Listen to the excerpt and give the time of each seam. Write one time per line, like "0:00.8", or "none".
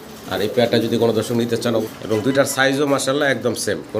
0:01.9